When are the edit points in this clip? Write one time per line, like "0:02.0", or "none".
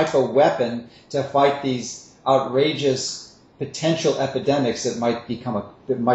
none